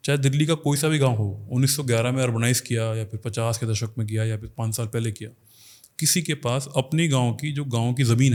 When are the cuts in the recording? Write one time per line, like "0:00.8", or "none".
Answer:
none